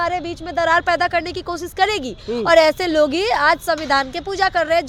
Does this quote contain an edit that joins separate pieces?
no; 0 cuts

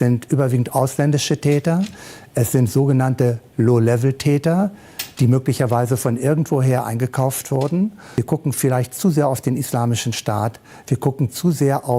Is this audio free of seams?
no; 1 cut; at 8.0 s

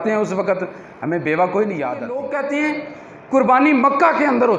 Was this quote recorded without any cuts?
no; 1 cut; at 2.2 s

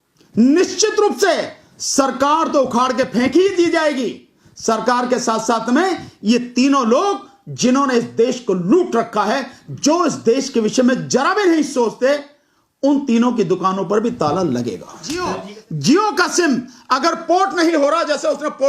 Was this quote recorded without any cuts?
no; 1 cut; at 15.3 s

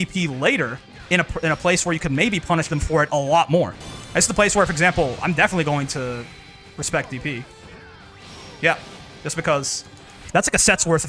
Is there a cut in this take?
yes; 2 cuts; at 3.8 s, 10.2 s

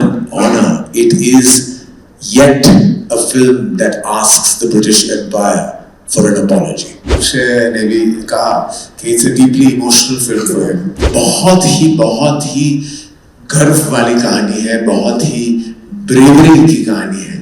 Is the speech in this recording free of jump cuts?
no; 2 cuts; at 7.2 s, 11.0 s

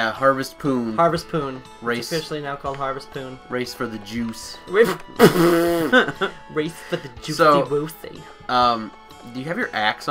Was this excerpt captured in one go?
yes; 0 cuts

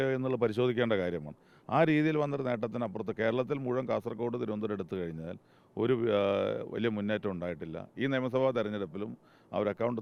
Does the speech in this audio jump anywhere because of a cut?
no; 0 cuts

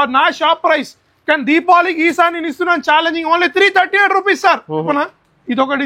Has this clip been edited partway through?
yes; 1 cut; at 4.9 s

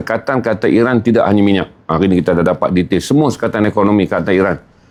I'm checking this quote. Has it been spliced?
no; 0 cuts

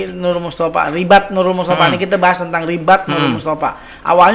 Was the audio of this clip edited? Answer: no; 0 cuts

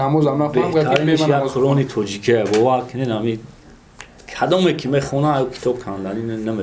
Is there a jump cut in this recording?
no; 0 cuts

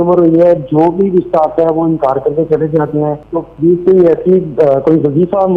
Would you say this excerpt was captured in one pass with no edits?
no; 1 cut; at 3.2 s

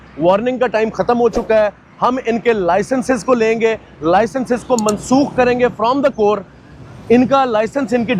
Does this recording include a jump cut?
no; 0 cuts

